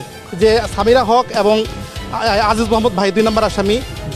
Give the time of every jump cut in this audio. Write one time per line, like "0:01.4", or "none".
none

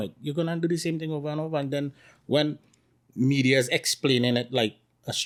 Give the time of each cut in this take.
none

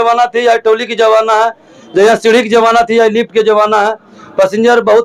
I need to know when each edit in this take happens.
none

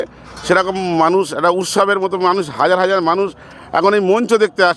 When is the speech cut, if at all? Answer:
none

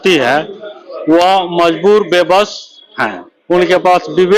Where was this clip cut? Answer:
none

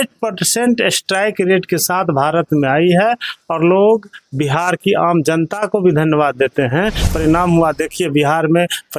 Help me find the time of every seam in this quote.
0:07.0

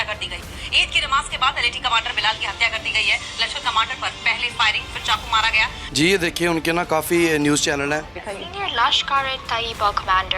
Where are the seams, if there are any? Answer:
0:05.9

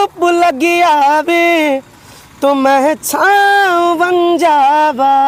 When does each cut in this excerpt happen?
none

